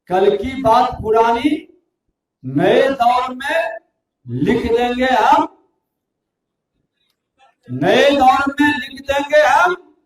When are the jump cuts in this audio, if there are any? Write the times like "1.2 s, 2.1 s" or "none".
none